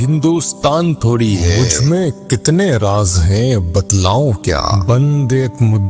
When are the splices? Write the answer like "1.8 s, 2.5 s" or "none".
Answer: 1.6 s, 4.8 s